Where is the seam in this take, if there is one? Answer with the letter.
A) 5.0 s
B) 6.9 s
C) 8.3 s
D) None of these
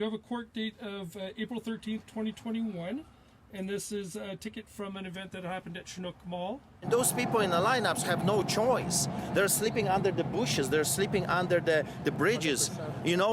B